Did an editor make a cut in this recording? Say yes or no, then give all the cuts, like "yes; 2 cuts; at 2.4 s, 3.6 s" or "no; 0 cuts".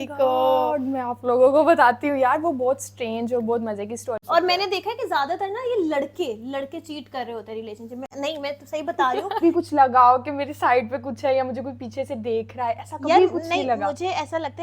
yes; 2 cuts; at 4.1 s, 9.4 s